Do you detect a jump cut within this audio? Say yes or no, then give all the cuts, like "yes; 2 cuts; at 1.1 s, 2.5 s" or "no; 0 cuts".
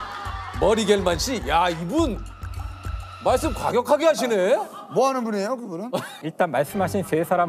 yes; 1 cut; at 6.2 s